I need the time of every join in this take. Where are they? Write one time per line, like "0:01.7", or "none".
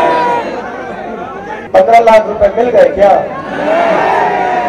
0:01.6